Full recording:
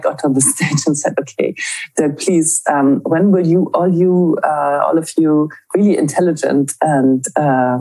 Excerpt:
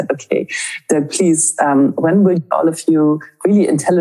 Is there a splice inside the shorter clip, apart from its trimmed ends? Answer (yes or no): yes